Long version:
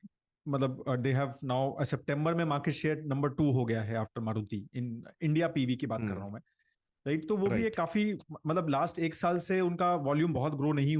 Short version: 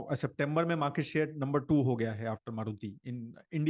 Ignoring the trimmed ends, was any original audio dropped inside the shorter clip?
no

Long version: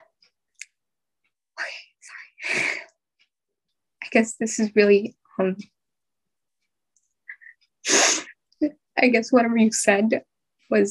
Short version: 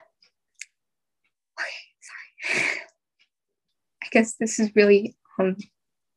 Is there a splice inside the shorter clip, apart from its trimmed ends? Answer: no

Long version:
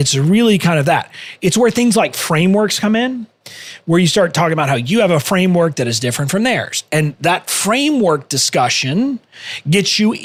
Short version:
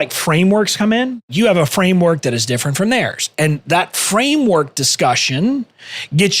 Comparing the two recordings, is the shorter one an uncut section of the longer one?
no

